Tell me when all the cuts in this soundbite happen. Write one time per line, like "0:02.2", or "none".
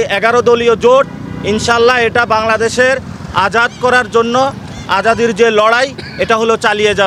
none